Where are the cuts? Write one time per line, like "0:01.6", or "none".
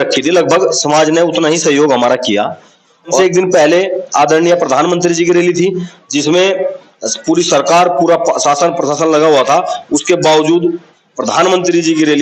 0:03.2